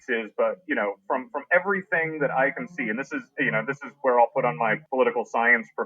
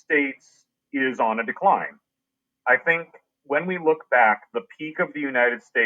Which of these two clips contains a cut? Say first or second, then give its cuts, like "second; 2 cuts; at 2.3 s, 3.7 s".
first; 1 cut; at 4.8 s